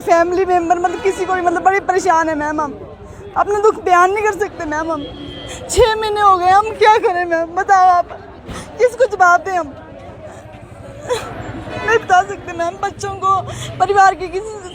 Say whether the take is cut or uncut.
uncut